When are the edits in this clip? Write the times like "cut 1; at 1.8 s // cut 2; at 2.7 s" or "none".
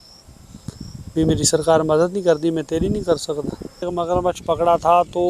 cut 1; at 3.8 s

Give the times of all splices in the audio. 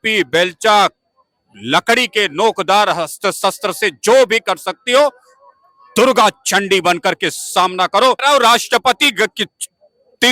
cut 1; at 8.2 s

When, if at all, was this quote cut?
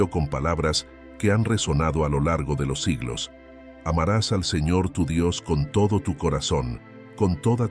none

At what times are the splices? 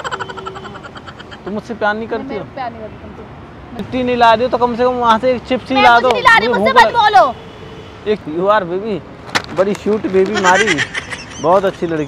cut 1; at 3.8 s // cut 2; at 8.2 s

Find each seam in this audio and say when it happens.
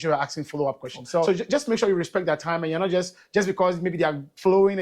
cut 1; at 1.3 s

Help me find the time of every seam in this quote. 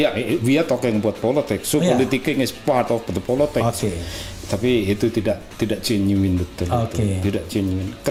none

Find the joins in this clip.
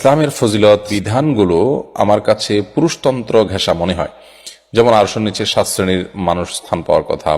cut 1; at 0.9 s

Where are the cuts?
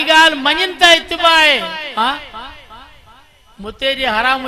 none

